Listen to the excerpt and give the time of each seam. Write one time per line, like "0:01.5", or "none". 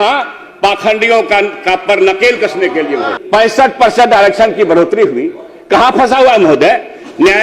0:03.1